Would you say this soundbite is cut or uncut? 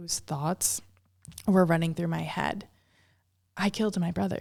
uncut